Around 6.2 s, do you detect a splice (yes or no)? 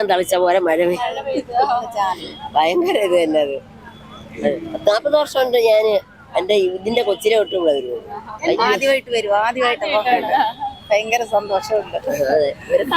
no